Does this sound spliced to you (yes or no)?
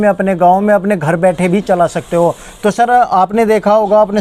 no